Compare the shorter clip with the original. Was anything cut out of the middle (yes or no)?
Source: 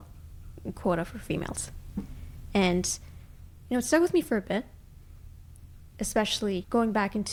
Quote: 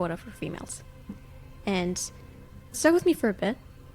yes